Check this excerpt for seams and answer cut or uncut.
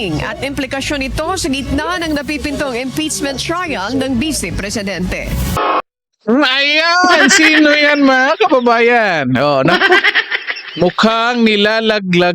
cut